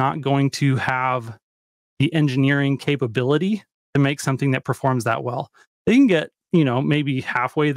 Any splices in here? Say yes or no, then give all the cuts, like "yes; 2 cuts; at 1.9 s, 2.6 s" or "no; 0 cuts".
no; 0 cuts